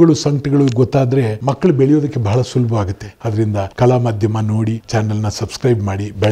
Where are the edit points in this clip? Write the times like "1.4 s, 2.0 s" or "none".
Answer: none